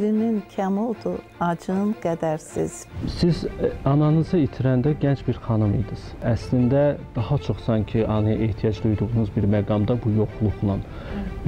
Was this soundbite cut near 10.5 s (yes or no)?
no